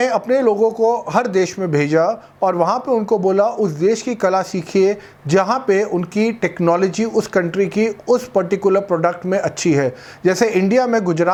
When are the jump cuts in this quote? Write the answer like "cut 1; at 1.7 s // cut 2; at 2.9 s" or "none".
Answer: none